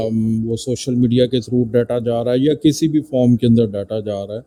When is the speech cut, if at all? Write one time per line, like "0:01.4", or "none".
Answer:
none